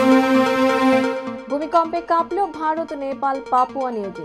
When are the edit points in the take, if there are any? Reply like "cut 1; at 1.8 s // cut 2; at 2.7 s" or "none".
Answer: cut 1; at 1.2 s